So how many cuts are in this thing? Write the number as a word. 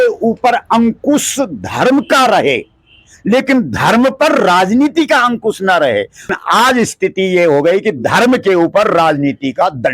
one